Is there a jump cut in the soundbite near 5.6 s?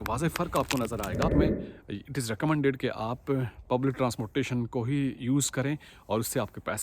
no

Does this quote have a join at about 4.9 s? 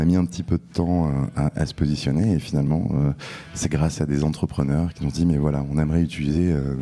yes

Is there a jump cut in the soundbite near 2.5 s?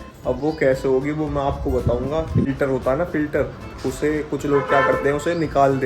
yes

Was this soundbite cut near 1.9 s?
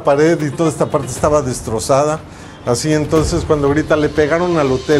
no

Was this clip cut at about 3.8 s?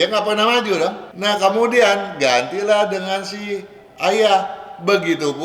no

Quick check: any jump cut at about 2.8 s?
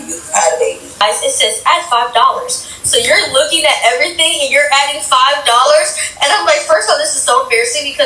no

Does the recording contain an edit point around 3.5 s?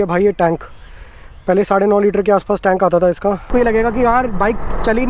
yes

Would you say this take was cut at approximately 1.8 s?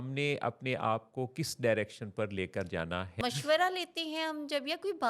no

